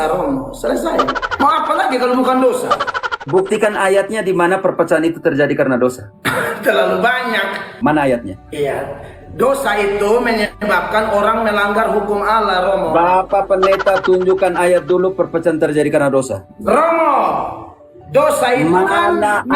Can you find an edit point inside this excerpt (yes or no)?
yes